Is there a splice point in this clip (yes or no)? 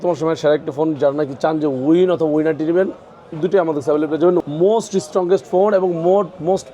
yes